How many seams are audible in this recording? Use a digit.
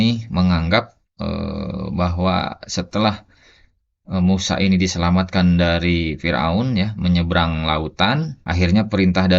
1